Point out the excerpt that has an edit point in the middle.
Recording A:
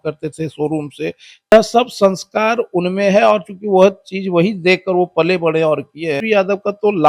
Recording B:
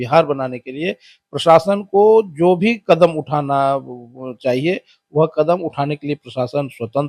A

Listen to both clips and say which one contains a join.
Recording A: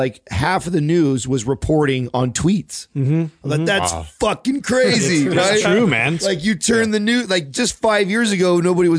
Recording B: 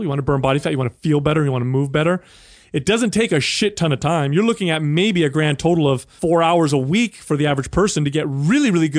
B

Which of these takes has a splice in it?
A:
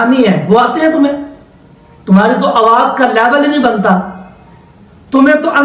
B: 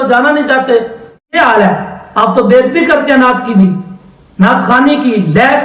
B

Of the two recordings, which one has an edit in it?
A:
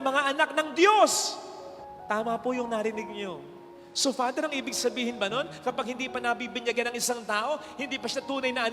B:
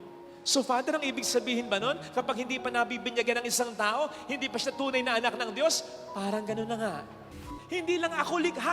B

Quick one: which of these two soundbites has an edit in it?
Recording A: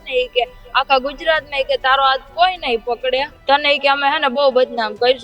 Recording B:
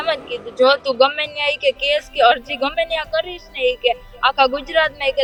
A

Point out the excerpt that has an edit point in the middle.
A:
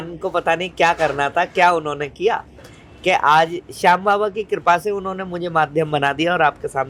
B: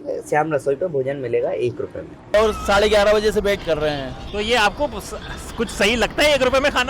B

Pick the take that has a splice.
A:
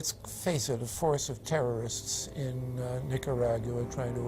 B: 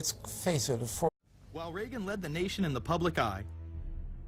A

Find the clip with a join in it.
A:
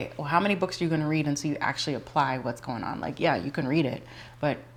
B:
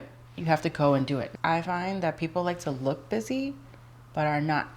B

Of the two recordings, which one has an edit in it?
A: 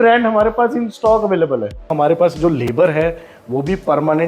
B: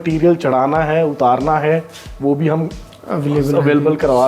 A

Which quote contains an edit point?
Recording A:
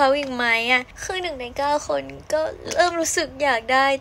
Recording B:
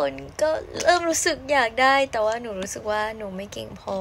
A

